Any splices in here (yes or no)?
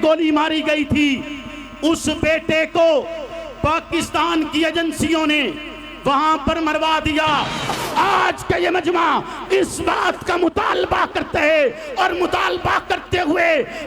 yes